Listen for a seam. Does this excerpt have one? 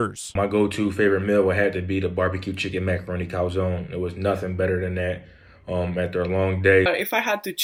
no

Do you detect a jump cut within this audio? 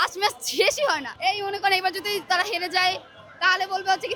yes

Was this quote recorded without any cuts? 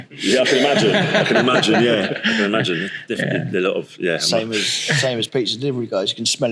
yes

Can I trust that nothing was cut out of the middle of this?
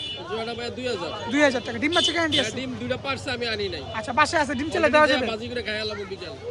yes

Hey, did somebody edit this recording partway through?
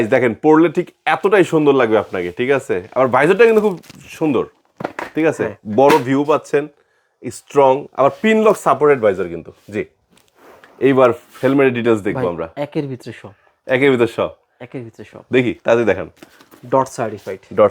no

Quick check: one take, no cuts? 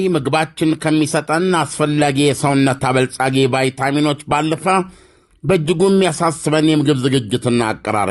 yes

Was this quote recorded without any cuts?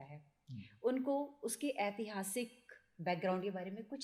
yes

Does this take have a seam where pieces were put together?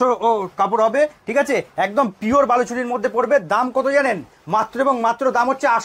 no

